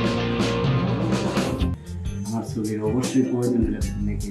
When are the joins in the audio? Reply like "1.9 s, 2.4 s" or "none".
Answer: 1.8 s